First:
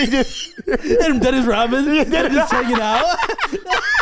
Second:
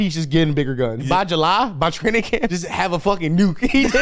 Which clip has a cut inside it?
second; 2 cuts; at 1.1 s, 2.5 s

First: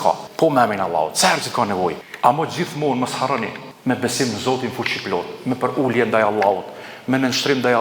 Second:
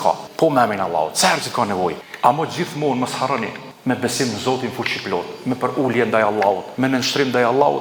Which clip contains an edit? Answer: second; 1 cut; at 6.7 s

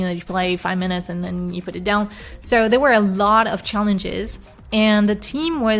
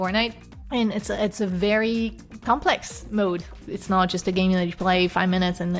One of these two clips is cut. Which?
second; 1 cut; at 3.5 s

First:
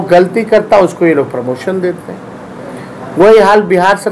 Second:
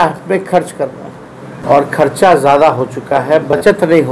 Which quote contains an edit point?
second; 1 cut; at 1.6 s

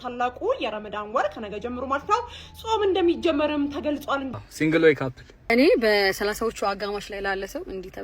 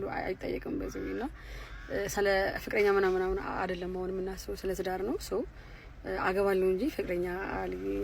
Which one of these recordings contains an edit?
first; 2 cuts; at 4.3 s, 5.5 s

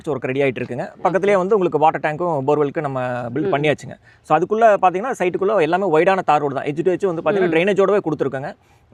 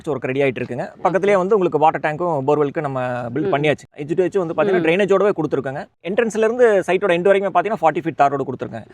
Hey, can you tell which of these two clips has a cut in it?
second; 2 cuts; at 4.0 s, 6.0 s

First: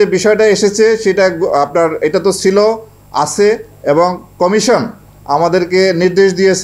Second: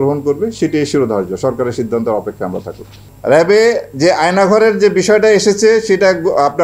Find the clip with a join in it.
second; 1 cut; at 3.0 s

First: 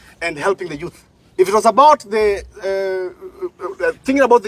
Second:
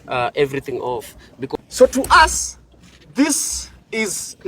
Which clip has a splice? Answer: second; 1 cut; at 1.5 s

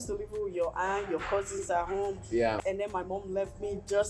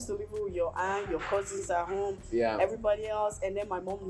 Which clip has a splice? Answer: first; 1 cut; at 2.6 s

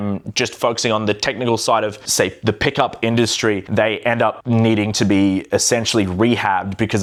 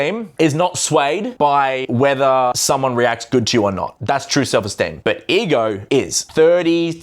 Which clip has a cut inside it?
second; 5 cuts; at 1.5 s, 2.6 s, 3.9 s, 4.9 s, 5.9 s

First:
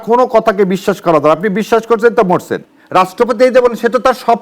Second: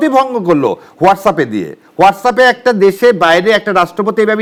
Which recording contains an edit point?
first; 1 cut; at 2.6 s

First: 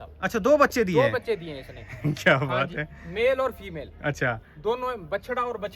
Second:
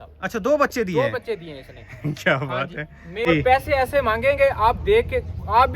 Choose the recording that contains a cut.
second; 1 cut; at 3.3 s

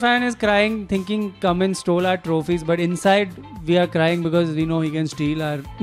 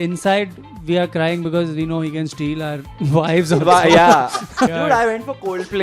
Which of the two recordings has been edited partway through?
second; 1 cut; at 4.7 s

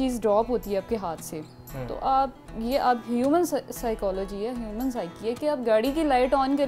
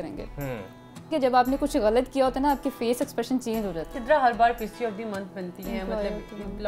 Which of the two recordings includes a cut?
second; 2 cuts; at 1.1 s, 3.9 s

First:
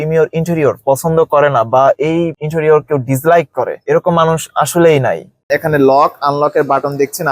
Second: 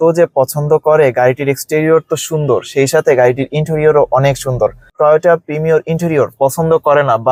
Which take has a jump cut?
first; 1 cut; at 5.5 s

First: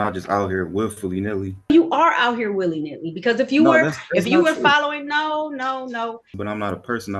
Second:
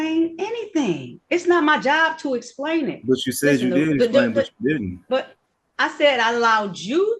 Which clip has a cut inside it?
first; 2 cuts; at 1.7 s, 6.3 s

